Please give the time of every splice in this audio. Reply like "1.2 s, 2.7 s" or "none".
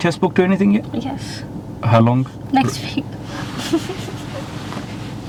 none